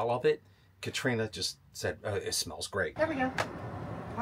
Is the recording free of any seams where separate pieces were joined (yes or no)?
no